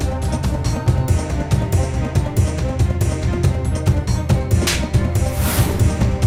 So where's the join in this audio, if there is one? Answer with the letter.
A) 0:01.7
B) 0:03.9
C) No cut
C